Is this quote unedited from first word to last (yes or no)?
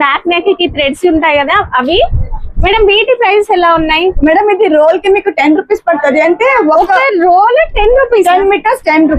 yes